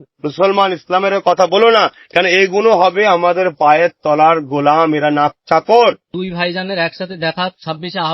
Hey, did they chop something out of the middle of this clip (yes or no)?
yes